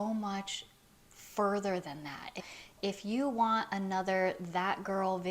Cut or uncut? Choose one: cut